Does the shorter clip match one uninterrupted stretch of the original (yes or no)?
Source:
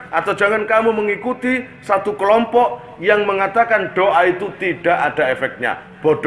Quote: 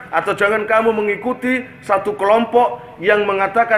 yes